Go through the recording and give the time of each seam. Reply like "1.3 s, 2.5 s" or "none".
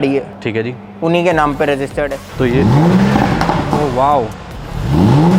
2.3 s